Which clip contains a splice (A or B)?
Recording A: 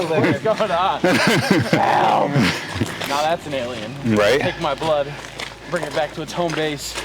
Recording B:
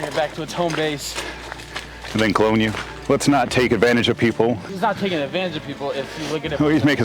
B